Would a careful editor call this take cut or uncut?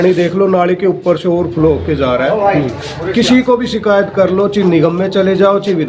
uncut